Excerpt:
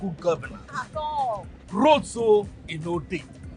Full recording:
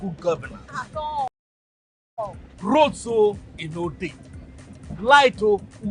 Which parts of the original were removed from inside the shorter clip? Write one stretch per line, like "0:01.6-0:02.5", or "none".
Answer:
0:01.3-0:02.2